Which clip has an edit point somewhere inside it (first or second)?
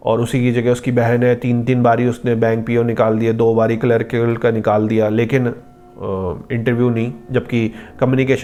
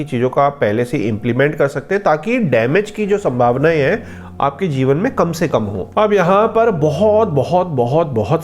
second